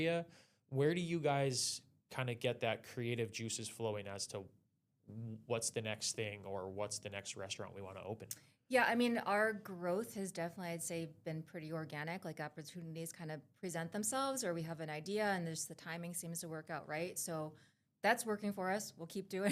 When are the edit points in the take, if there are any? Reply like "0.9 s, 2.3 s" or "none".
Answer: none